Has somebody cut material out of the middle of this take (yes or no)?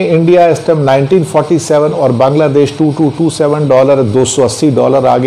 no